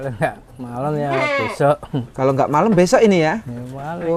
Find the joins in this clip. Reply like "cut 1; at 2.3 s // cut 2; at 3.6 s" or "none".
none